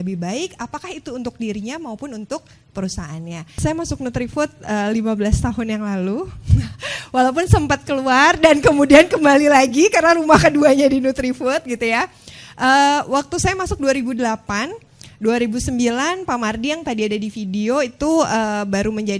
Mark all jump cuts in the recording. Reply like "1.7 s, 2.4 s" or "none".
3.5 s